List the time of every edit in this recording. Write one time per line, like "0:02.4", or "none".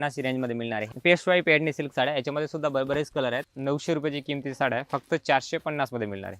0:00.8
0:03.4